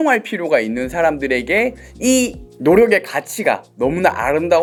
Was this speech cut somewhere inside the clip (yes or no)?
no